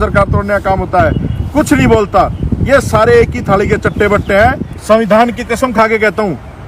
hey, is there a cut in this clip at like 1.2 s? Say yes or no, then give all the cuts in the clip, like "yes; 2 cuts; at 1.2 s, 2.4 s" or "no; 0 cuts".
no; 1 cut; at 4.7 s